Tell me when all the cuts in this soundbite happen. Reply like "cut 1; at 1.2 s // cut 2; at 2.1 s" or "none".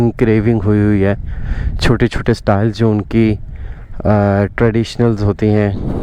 none